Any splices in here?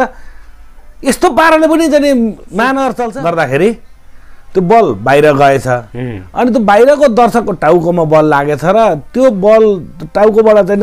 yes; 1 cut; at 3.1 s

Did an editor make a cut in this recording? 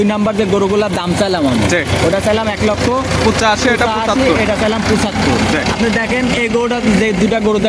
no; 0 cuts

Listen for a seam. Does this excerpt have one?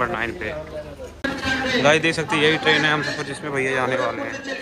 yes; 1 cut; at 1.0 s

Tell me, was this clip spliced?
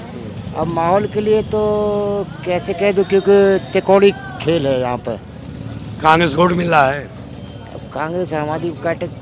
no; 0 cuts

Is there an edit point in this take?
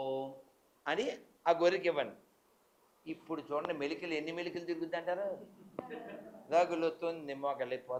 no; 0 cuts

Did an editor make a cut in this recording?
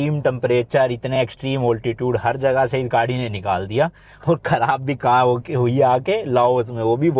no; 0 cuts

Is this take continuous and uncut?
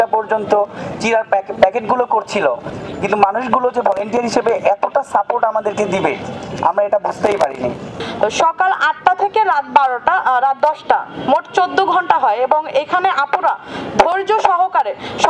no; 2 cuts; at 2.7 s, 7.9 s

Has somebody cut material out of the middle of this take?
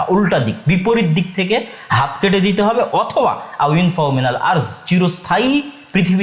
no; 0 cuts

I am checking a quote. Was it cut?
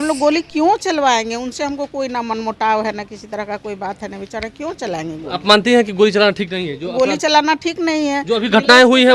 no; 0 cuts

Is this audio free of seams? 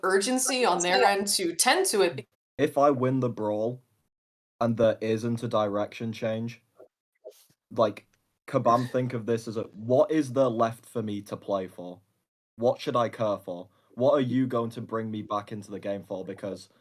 no; 1 cut; at 2.2 s

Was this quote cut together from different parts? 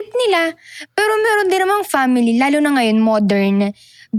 no; 0 cuts

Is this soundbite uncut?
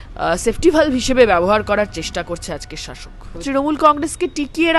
no; 1 cut; at 3.4 s

